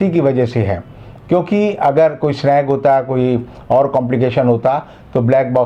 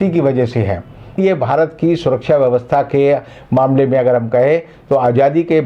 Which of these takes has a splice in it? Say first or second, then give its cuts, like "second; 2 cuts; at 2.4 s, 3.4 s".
second; 1 cut; at 1.2 s